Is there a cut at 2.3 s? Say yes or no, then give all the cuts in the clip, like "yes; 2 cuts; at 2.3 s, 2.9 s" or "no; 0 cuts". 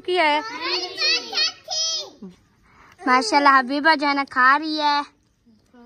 yes; 1 cut; at 2.3 s